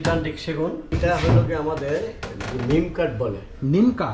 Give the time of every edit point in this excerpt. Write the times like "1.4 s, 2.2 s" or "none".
0.9 s